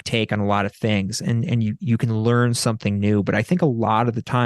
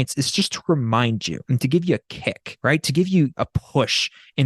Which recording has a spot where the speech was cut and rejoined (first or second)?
second